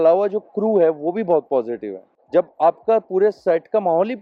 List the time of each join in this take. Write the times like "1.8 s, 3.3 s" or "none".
none